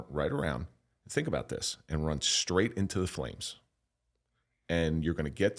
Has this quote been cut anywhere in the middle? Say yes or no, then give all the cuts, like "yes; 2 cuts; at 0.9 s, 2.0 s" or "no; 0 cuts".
no; 0 cuts